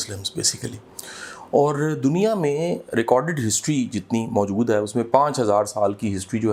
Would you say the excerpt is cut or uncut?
uncut